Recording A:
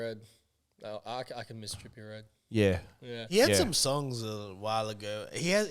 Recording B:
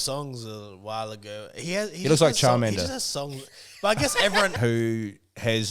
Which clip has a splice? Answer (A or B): B